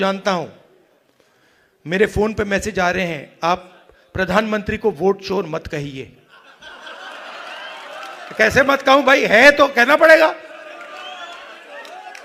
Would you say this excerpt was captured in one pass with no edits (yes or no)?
yes